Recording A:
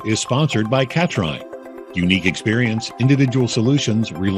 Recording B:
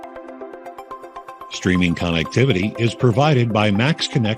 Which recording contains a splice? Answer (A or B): B